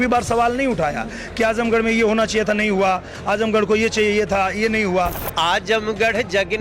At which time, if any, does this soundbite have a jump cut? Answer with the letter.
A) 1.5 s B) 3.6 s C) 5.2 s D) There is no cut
C